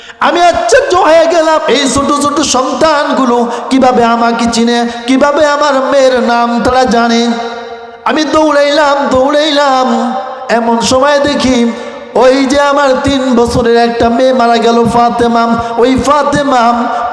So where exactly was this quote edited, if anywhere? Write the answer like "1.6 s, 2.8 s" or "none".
1.6 s